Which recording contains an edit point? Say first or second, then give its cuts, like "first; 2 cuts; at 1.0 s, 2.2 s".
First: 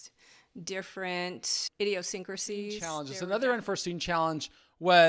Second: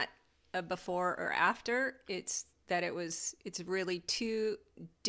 first; 2 cuts; at 1.6 s, 3.1 s